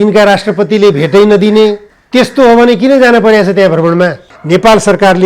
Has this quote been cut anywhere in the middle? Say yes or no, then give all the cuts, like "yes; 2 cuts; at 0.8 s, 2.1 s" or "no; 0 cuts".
yes; 2 cuts; at 1.9 s, 4.3 s